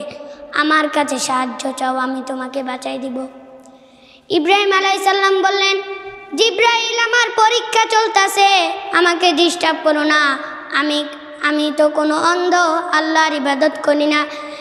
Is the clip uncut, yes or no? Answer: yes